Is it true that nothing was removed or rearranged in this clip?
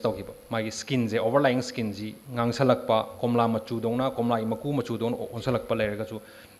yes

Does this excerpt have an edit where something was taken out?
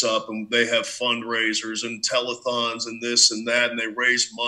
no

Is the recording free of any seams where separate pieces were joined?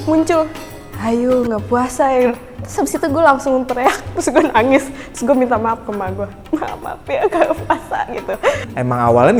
yes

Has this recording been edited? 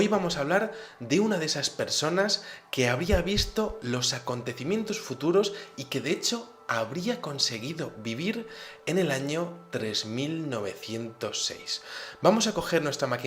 yes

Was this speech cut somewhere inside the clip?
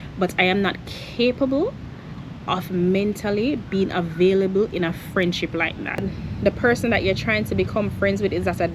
yes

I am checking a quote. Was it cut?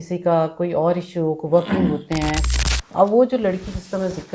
yes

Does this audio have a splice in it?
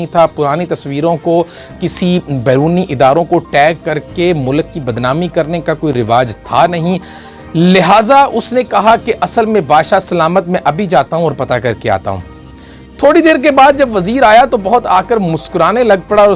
no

